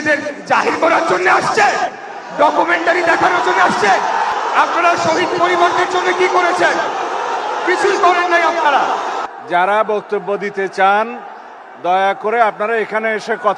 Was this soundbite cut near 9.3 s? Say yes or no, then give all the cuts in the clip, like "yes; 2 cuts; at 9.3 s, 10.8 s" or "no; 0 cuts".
yes; 2 cuts; at 4.3 s, 9.3 s